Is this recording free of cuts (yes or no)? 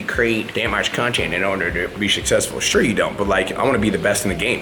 yes